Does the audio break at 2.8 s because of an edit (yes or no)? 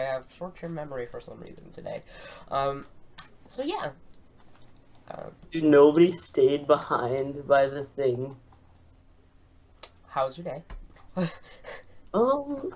no